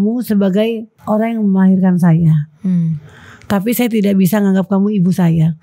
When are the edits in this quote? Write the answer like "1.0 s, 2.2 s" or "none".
0.9 s